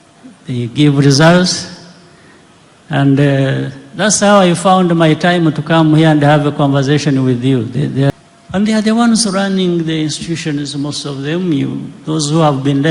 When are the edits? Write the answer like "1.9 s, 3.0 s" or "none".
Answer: 8.1 s

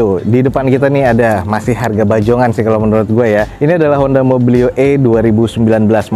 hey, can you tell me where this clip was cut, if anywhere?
none

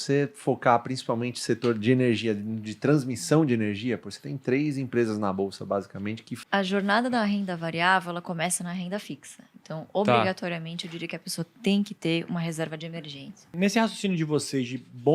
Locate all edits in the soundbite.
6.3 s, 13.5 s

